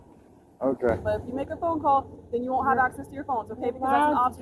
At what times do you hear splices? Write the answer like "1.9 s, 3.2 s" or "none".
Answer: 1.0 s